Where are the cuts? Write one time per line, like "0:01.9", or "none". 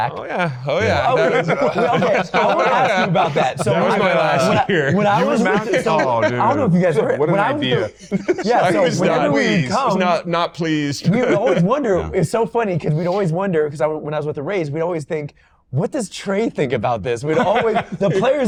none

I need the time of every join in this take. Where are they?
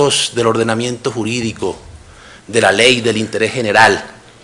none

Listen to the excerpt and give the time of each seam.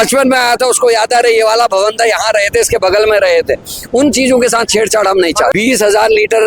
0:05.5

